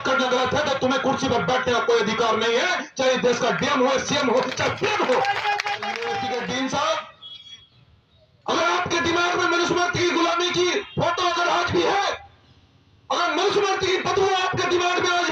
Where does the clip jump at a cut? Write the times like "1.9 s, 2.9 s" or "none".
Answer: 6.1 s